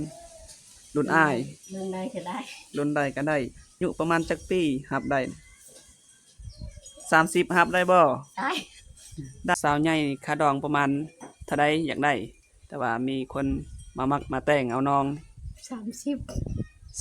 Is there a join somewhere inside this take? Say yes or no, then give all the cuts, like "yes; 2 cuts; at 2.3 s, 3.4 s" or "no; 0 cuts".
yes; 2 cuts; at 3.8 s, 9.5 s